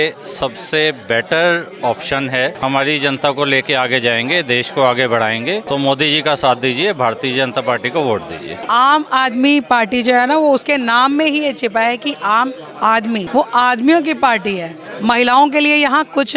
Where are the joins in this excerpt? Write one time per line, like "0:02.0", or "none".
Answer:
0:02.6
0:05.6
0:08.6
0:13.3